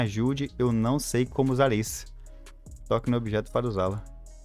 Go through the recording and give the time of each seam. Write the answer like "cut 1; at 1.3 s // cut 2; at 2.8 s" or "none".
none